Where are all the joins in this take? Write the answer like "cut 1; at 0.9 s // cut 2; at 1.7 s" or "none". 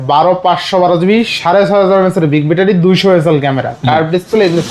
none